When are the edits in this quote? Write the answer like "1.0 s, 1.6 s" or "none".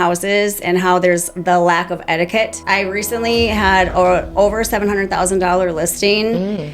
2.6 s